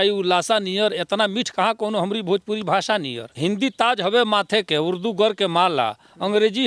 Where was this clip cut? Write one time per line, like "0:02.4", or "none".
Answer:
0:03.2